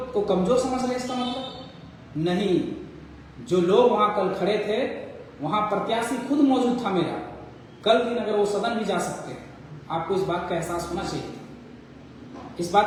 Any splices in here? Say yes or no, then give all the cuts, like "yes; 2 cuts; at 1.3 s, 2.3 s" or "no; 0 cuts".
no; 0 cuts